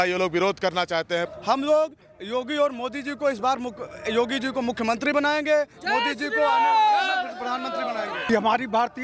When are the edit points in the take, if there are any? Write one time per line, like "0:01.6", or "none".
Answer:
0:01.3
0:08.2

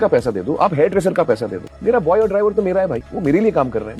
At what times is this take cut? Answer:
none

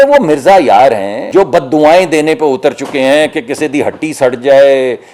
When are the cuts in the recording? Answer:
0:01.1

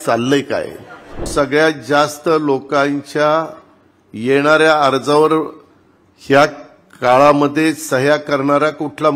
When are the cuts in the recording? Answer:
0:01.3

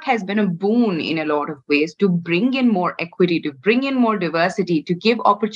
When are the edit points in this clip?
none

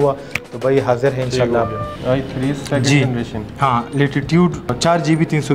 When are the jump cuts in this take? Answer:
0:01.9
0:04.8

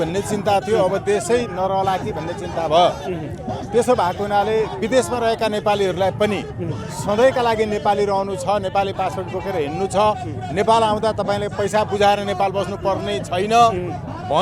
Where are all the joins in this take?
none

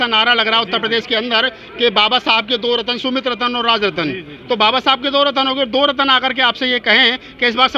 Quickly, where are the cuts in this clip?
none

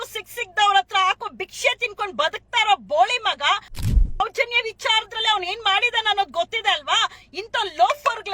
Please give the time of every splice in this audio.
0:04.2

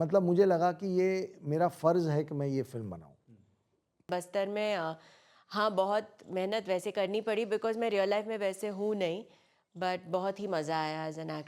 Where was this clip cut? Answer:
0:04.1

